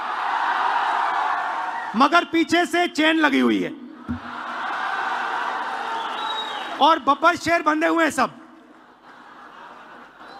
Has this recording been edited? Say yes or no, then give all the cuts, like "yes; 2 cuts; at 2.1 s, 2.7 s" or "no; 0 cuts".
no; 0 cuts